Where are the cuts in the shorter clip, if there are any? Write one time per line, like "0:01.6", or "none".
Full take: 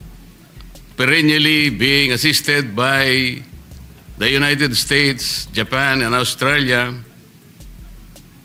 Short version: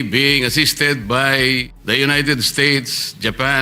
0:01.7